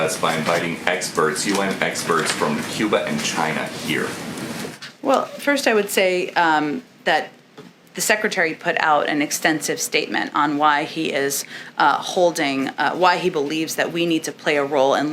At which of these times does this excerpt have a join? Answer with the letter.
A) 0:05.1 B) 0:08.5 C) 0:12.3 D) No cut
D